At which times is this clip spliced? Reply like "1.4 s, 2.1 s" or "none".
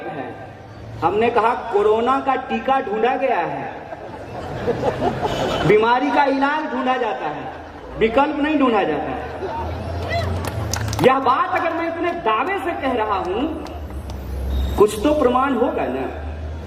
none